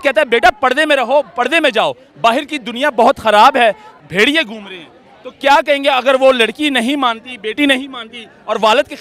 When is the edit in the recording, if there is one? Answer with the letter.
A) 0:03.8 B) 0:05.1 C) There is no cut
C